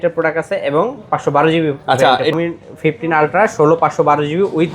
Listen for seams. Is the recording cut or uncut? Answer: cut